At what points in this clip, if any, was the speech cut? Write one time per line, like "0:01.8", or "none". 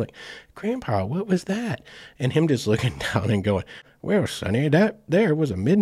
0:03.9